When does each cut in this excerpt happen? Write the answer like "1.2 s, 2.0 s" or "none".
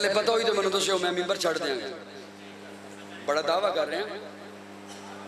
none

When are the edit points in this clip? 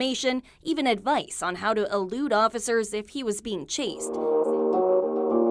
4.0 s

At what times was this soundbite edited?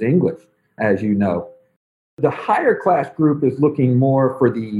2.1 s

